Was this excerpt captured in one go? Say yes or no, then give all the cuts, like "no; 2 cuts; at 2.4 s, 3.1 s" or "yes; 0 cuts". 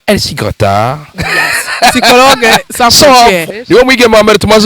no; 1 cut; at 3.4 s